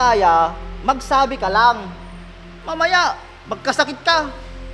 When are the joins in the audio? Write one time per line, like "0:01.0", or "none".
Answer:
none